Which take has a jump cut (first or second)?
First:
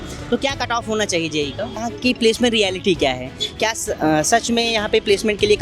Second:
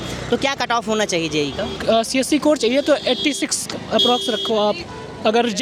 first